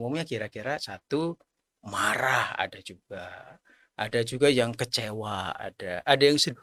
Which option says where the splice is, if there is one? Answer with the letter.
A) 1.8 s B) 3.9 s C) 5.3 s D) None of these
D